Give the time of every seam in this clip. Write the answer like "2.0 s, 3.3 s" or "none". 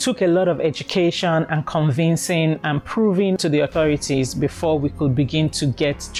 none

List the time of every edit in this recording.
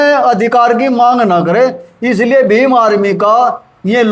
none

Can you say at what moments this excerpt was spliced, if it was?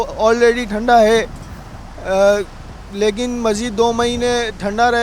none

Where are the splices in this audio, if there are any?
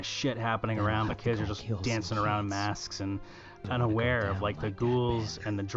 3.7 s

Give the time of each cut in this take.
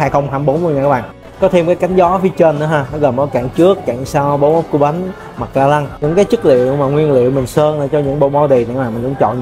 none

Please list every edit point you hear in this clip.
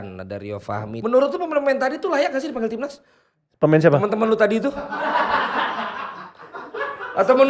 1.0 s

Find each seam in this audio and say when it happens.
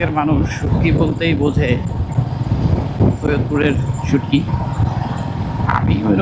none

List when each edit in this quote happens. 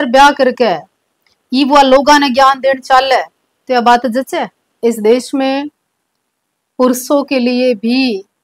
4.6 s

